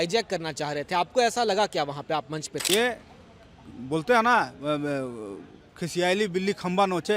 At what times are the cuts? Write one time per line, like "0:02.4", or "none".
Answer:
0:02.5